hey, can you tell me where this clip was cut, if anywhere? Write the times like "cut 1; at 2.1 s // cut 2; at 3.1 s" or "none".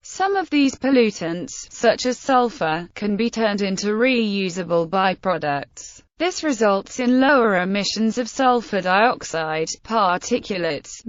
cut 1; at 6.3 s